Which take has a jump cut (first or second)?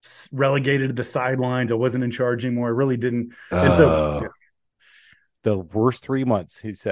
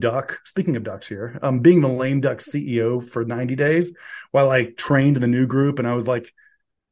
first